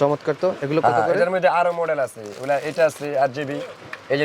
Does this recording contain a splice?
no; 0 cuts

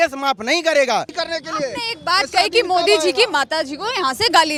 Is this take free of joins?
yes; 0 cuts

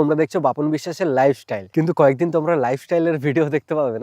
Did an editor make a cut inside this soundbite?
yes; 1 cut; at 1.5 s

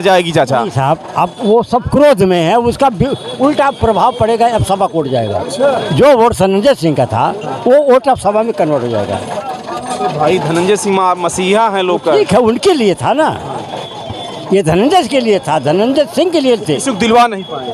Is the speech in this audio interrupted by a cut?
no; 0 cuts

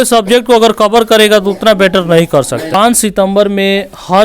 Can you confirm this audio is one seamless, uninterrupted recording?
no; 1 cut; at 2.6 s

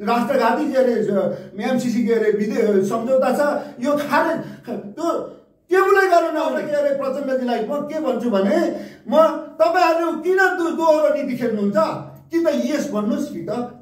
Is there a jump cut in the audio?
yes; 1 cut; at 6.6 s

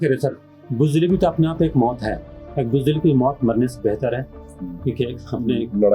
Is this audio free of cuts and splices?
yes; 0 cuts

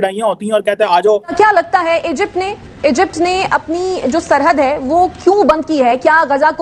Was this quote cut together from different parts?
yes; 1 cut; at 1.3 s

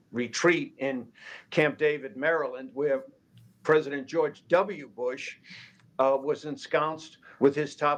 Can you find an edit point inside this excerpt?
no; 0 cuts

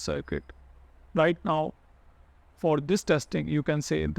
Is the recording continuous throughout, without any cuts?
yes; 0 cuts

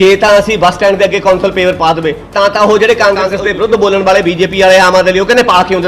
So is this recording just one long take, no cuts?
no; 2 cuts; at 2.2 s, 3.3 s

